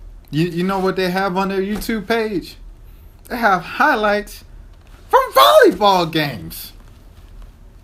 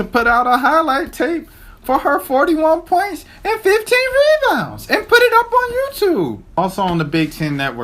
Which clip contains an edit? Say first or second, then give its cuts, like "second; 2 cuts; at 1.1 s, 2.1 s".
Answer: second; 1 cut; at 6.6 s